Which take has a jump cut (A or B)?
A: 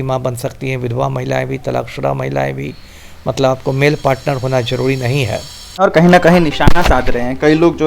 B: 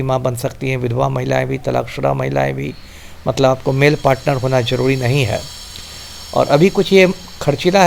A